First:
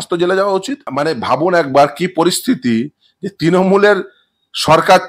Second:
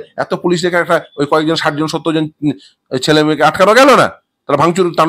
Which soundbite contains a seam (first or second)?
first